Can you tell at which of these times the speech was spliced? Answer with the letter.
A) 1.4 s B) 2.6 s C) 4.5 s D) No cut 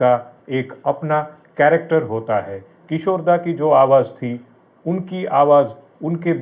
D